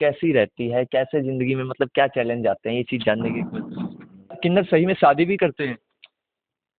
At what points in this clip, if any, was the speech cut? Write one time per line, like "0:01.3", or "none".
0:04.3